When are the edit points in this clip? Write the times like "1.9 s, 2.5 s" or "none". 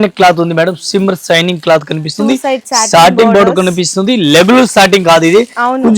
none